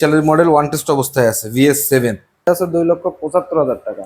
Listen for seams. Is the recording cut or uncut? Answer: cut